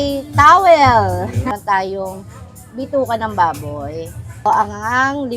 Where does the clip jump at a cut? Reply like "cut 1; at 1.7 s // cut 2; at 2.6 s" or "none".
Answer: cut 1; at 1.5 s // cut 2; at 4.4 s